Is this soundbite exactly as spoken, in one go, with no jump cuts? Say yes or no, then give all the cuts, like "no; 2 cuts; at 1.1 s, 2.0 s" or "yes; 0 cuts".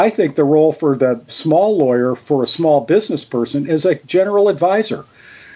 no; 2 cuts; at 1.3 s, 4.0 s